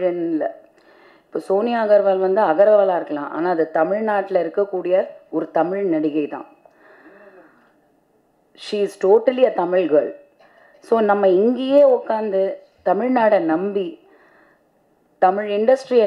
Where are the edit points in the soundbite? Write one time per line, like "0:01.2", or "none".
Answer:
none